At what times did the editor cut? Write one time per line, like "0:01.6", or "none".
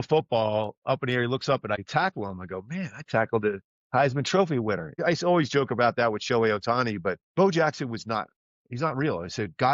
0:01.8
0:05.0
0:07.2